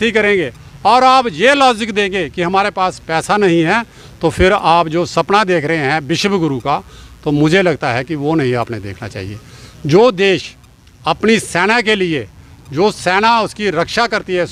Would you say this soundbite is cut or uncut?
uncut